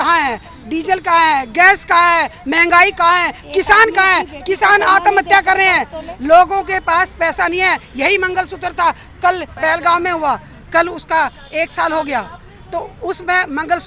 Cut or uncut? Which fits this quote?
uncut